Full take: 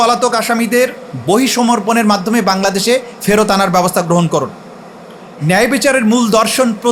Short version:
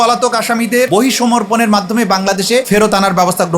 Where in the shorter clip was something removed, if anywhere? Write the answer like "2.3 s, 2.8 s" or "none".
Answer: 0.9 s, 2.7 s